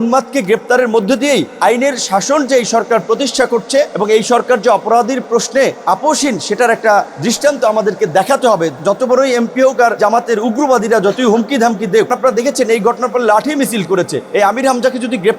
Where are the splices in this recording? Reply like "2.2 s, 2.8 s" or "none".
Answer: 1.5 s, 3.9 s, 5.8 s, 7.1 s, 8.8 s, 10.0 s, 12.1 s, 14.2 s